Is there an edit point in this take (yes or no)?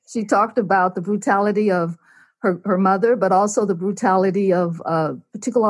no